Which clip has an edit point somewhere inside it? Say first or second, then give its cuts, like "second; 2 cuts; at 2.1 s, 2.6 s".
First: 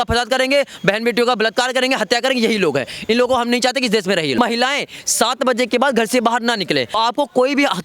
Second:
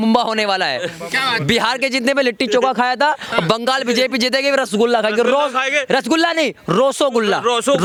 first; 2 cuts; at 4.4 s, 7.0 s